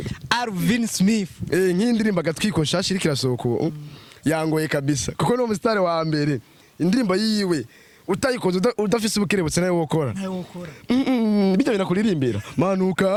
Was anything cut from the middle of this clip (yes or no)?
no